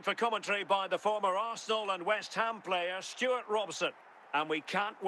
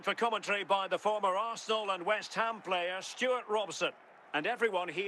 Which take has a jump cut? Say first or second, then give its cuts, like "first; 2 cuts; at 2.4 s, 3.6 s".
first; 1 cut; at 4.1 s